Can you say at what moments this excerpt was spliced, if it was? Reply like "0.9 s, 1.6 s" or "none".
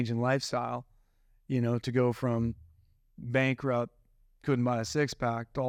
none